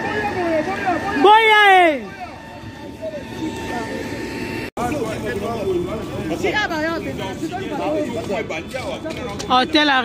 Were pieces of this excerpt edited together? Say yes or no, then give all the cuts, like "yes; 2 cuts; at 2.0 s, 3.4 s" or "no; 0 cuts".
no; 0 cuts